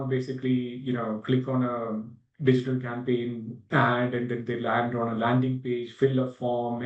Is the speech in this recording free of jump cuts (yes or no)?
no